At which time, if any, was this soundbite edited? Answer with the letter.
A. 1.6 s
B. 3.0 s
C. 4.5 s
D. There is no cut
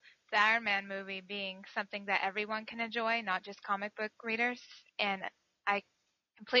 D